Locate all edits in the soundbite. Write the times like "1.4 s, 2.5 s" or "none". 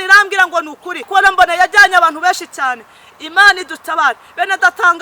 1.1 s